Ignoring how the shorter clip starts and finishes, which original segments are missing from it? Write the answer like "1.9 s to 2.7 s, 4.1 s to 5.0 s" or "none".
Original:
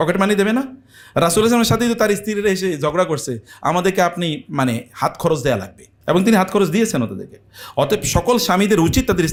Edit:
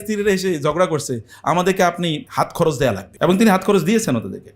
4.4 s to 4.9 s, 5.7 s to 5.9 s